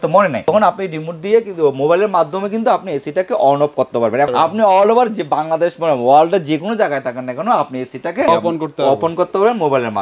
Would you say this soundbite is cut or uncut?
cut